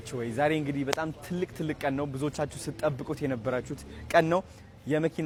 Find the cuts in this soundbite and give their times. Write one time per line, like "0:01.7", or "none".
none